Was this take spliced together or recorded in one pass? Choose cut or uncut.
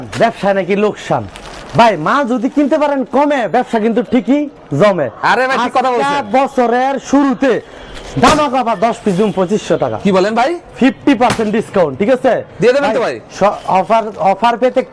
uncut